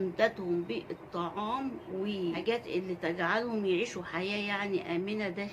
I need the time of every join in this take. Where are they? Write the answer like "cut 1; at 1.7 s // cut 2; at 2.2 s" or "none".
cut 1; at 2.4 s